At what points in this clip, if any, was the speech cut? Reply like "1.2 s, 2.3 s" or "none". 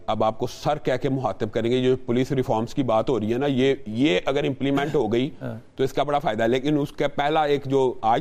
none